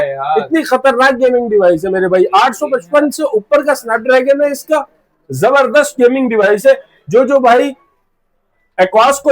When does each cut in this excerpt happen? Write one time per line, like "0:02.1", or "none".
none